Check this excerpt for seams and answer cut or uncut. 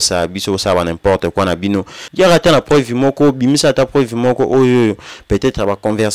cut